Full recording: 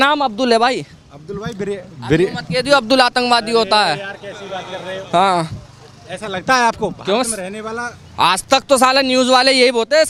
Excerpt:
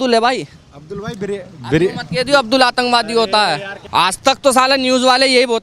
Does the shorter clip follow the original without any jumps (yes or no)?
no